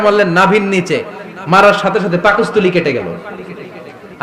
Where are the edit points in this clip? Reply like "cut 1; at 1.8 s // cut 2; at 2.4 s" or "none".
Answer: none